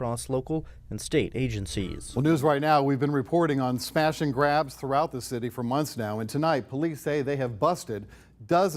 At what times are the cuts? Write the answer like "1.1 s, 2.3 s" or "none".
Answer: 1.9 s